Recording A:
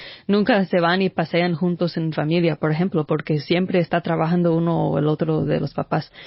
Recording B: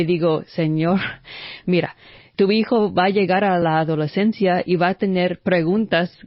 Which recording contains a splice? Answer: B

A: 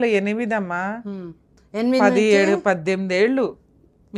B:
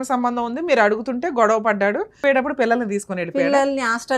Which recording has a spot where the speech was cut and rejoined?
B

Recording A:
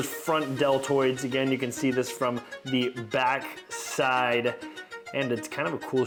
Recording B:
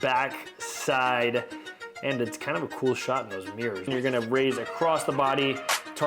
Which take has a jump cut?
B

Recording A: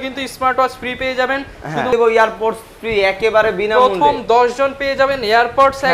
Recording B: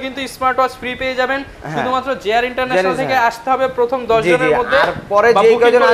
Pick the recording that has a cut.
A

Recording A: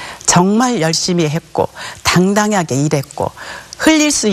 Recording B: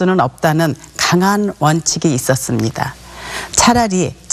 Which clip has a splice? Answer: A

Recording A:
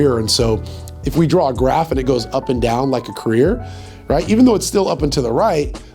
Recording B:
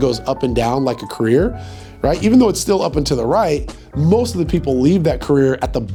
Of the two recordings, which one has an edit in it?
A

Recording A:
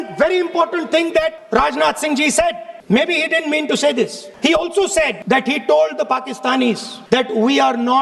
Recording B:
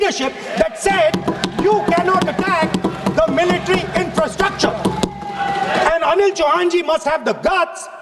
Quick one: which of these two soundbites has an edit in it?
A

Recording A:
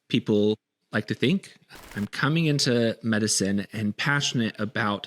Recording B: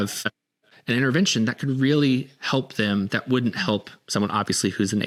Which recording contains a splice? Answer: A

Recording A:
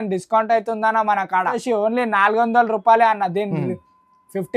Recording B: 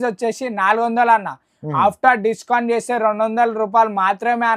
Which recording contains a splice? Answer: A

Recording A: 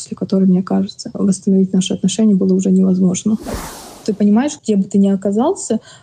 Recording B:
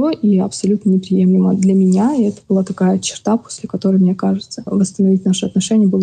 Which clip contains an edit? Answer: A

